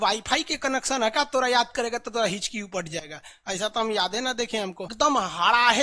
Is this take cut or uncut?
cut